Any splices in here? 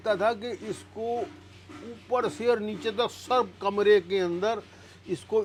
no; 0 cuts

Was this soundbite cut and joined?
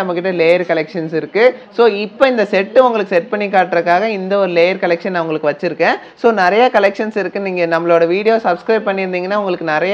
no; 0 cuts

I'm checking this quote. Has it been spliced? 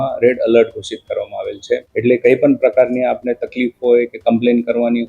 yes; 1 cut; at 1.9 s

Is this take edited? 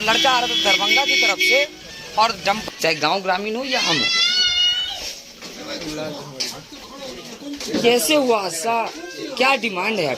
yes; 1 cut; at 2.6 s

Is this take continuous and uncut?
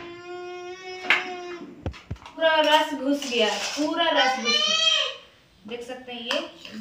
no; 1 cut; at 2.3 s

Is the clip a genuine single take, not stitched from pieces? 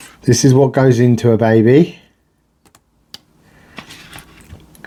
yes; 0 cuts

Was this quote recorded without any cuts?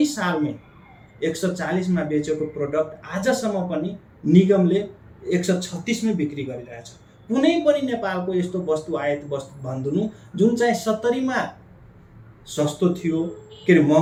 yes; 0 cuts

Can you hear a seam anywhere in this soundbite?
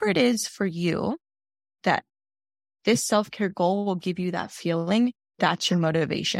no; 0 cuts

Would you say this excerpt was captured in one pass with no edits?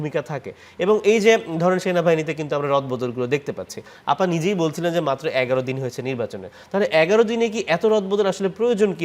yes; 0 cuts

